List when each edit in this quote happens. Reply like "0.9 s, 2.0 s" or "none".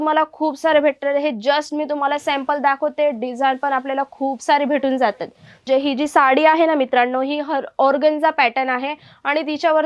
5.6 s